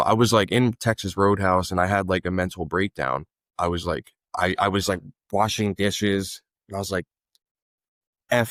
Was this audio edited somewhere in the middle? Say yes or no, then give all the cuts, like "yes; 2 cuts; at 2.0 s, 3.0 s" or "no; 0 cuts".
no; 0 cuts